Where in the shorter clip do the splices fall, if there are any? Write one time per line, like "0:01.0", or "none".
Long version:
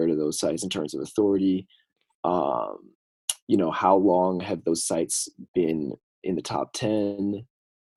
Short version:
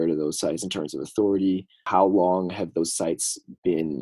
0:01.8